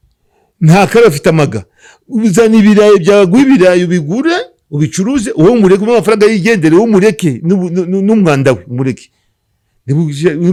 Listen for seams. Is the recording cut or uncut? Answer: uncut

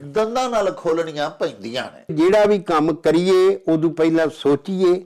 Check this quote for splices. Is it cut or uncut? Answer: cut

